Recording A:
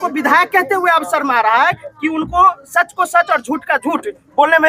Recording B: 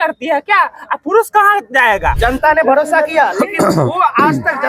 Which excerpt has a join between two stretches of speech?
B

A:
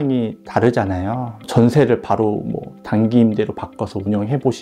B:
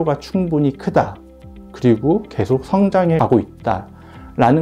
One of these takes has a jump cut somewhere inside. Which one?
A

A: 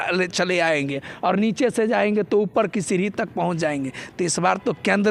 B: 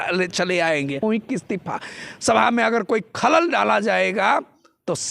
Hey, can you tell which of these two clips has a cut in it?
B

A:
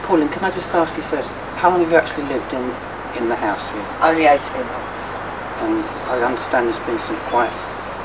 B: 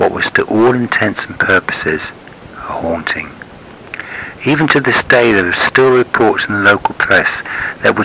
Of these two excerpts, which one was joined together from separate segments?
B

